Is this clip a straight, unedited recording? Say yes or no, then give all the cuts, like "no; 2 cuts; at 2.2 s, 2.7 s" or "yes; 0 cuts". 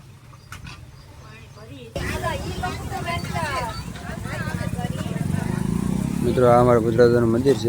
no; 1 cut; at 2.0 s